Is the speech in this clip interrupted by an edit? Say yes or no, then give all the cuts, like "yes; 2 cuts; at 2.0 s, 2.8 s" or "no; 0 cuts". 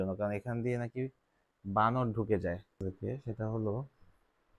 yes; 1 cut; at 2.8 s